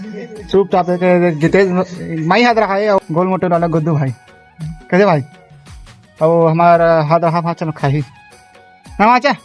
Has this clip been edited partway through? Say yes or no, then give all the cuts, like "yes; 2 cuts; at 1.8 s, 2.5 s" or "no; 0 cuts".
yes; 4 cuts; at 0.8 s, 3.0 s, 4.7 s, 8.4 s